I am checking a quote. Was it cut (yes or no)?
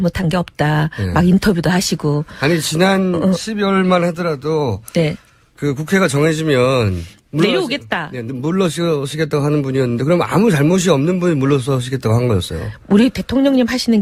no